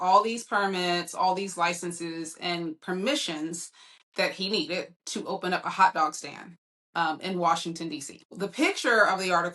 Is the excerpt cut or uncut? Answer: cut